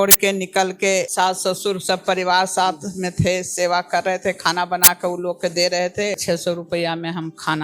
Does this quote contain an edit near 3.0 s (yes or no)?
no